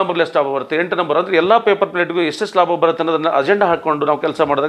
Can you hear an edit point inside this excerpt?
no; 0 cuts

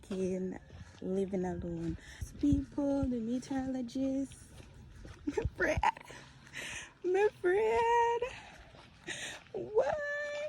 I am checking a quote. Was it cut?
yes; 1 cut; at 2.3 s

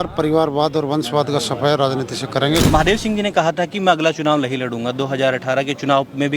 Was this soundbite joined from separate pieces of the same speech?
yes; 1 cut; at 2.6 s

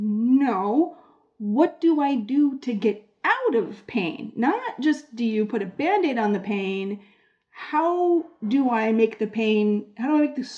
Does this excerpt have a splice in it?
no; 0 cuts

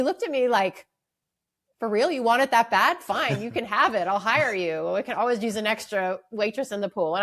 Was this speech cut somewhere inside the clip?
no; 0 cuts

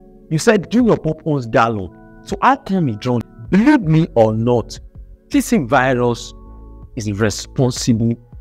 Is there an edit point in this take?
yes; 1 cut; at 3.2 s

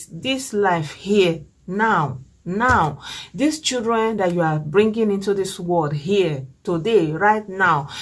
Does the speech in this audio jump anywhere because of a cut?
no; 0 cuts

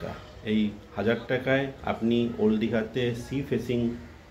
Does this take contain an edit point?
yes; 1 cut; at 1.8 s

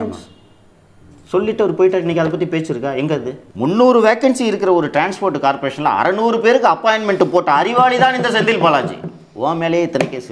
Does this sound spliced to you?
yes; 1 cut; at 3.4 s

